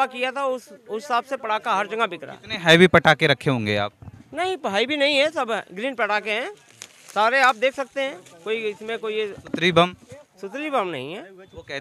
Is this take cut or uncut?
uncut